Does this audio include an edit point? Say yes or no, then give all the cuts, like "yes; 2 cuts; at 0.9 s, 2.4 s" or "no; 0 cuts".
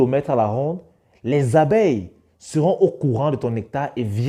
no; 0 cuts